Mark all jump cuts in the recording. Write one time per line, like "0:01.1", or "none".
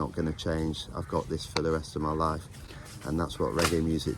none